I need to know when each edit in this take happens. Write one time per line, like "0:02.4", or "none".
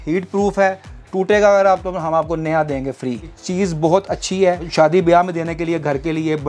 0:03.4
0:04.7